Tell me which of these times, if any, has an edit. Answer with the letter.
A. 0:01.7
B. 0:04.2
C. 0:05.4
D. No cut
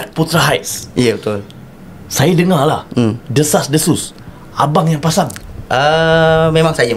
C